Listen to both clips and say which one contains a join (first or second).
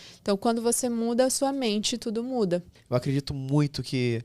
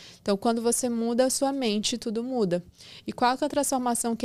first